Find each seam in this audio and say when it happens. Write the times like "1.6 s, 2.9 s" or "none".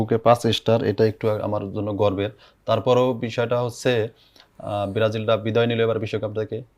none